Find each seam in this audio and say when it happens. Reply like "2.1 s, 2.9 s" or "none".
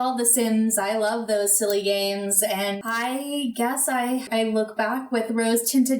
2.8 s, 4.3 s